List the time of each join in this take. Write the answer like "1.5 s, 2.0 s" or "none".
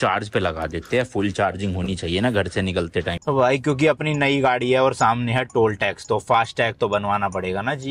3.2 s